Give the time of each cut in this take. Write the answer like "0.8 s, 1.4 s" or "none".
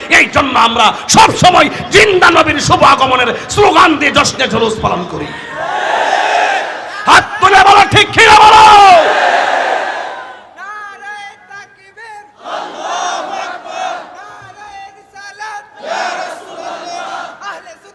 none